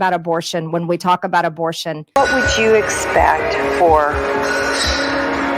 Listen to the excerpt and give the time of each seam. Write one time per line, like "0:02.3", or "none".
0:02.2